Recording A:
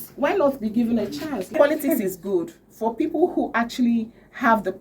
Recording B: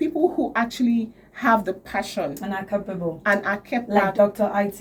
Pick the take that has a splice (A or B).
A